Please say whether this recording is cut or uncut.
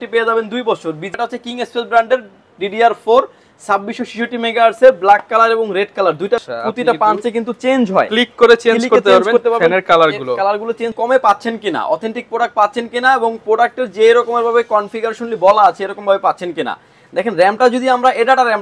cut